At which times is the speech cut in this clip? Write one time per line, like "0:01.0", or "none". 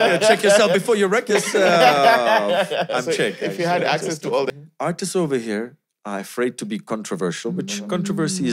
0:04.5